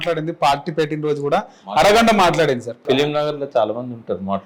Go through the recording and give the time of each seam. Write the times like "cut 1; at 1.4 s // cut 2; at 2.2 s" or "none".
cut 1; at 2.8 s